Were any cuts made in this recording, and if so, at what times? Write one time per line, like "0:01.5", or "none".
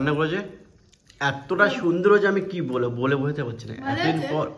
none